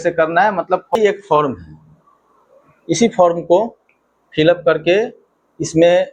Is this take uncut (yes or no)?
no